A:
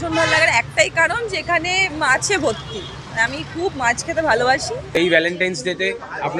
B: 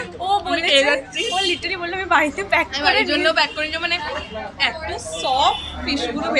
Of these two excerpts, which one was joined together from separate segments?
A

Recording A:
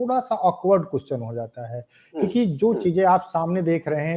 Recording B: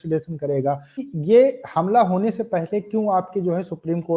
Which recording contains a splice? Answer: B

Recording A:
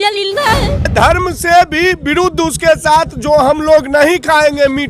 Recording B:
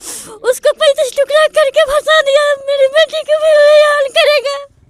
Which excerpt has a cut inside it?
A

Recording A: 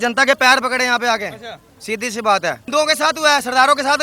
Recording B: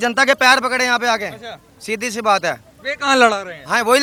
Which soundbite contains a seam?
A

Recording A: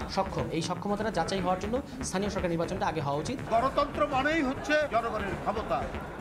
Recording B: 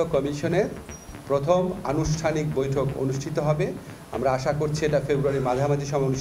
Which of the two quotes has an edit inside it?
A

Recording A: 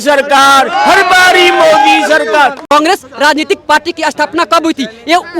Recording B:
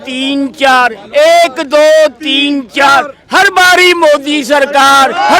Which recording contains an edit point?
A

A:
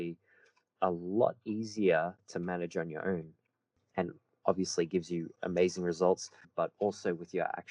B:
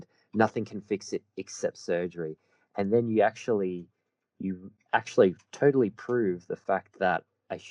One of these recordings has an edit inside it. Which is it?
A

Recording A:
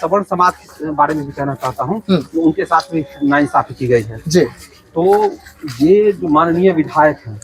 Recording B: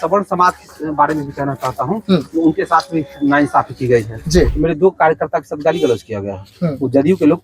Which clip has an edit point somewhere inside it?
B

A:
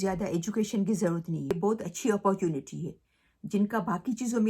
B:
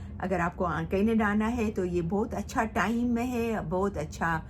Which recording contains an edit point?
A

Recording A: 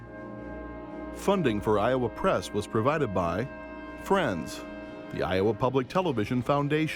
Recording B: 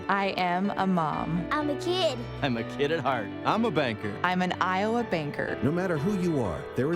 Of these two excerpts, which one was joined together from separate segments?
A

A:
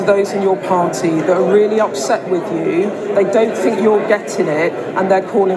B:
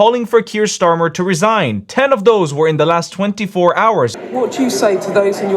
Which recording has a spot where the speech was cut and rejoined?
B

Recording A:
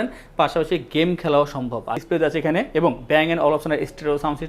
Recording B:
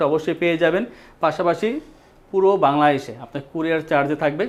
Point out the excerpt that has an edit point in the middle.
A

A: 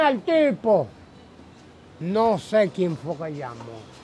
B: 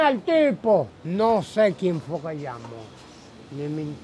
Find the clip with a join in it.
B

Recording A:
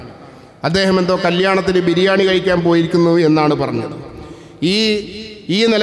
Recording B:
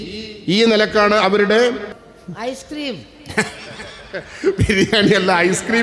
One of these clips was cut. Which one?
B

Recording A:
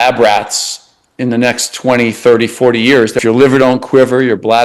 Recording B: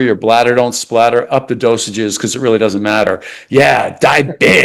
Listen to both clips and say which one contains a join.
A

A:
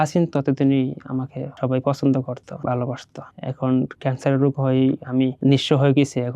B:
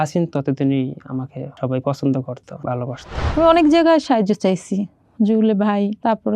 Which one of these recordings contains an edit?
B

